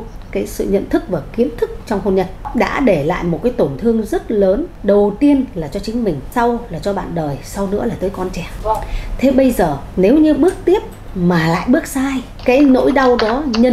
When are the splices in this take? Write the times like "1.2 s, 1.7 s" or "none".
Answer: 2.4 s, 4.7 s, 6.2 s, 8.5 s, 9.8 s, 12.3 s